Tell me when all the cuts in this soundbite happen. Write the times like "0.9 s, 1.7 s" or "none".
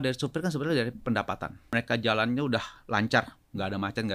1.6 s